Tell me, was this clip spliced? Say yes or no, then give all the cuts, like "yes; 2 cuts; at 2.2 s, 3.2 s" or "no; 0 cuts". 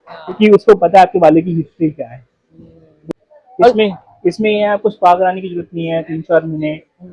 yes; 1 cut; at 2.9 s